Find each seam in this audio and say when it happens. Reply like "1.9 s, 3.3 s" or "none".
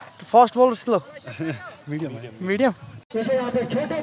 3.1 s